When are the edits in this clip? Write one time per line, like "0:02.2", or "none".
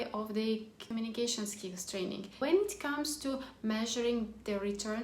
0:02.3